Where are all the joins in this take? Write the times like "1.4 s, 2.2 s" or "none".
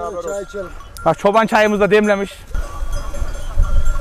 2.4 s